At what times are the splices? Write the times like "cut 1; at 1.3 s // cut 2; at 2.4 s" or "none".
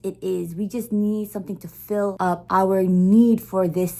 cut 1; at 2.3 s